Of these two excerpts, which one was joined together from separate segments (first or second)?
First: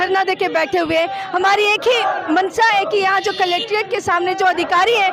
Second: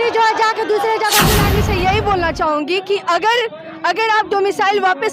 second